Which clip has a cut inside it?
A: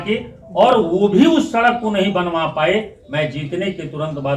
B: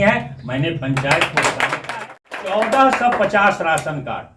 B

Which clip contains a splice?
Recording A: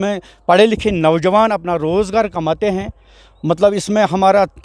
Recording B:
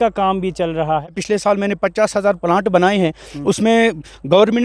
B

